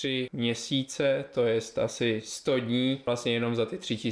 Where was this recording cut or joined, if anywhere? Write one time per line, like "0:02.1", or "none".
0:03.0